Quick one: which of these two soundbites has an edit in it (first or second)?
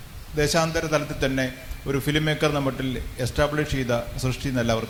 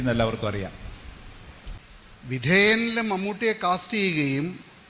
second